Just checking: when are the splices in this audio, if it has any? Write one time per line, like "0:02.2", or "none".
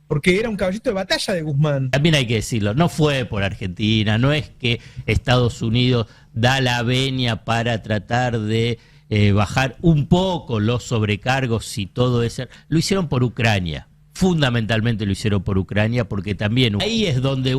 0:01.9
0:16.8